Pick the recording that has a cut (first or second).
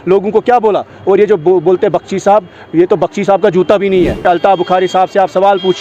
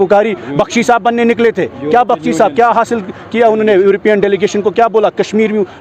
first